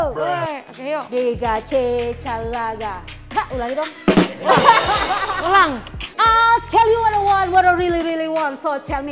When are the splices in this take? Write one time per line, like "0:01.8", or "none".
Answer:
0:06.1